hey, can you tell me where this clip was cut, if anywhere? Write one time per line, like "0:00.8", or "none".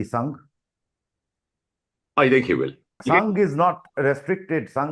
0:03.0